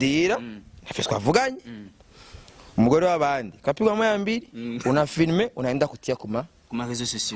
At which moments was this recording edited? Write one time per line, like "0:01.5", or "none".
none